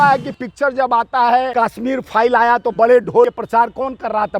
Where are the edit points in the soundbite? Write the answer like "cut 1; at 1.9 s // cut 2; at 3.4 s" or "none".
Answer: cut 1; at 1.5 s // cut 2; at 3.3 s